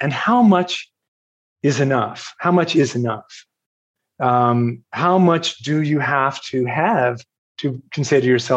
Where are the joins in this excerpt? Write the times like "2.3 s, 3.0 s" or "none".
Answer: none